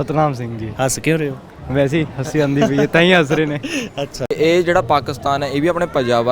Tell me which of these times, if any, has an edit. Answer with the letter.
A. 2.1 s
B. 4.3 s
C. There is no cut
B